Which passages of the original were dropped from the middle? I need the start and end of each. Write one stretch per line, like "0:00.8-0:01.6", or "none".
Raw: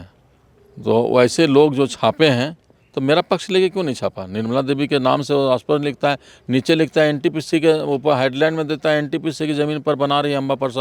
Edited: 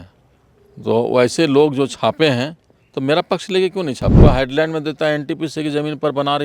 0:04.2-0:08.0

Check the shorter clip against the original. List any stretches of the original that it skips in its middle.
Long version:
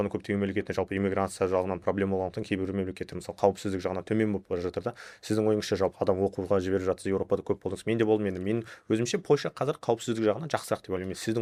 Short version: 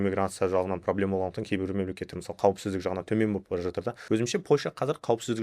0:04.9-0:08.7

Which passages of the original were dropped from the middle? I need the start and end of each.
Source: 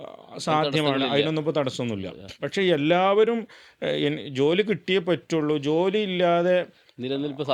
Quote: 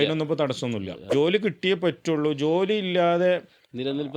0:02.2-0:04.2

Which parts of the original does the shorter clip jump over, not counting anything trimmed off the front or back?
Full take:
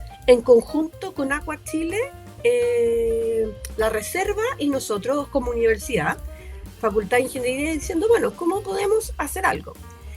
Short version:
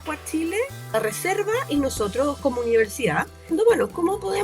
0:02.3-0:03.8
0:06.3-0:07.8

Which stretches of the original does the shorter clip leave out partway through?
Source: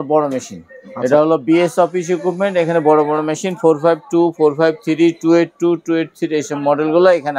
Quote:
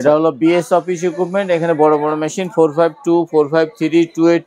none

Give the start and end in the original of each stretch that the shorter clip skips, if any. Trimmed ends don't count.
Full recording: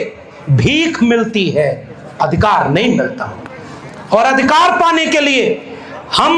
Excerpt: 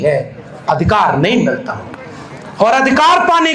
none

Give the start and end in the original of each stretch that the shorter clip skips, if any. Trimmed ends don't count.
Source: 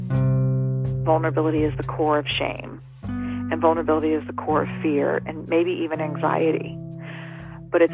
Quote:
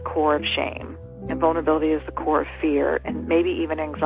0:03.0-0:03.4

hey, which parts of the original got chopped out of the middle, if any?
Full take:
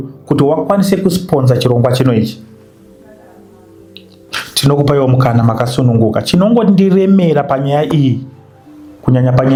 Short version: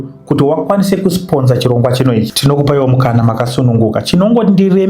0:02.3-0:04.5

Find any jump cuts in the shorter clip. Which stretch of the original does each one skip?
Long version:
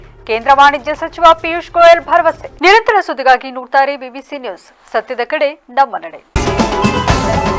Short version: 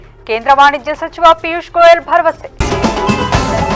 0:02.5-0:06.2

